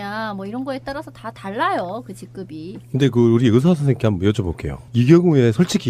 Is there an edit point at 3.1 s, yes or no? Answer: yes